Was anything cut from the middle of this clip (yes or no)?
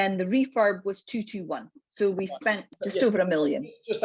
yes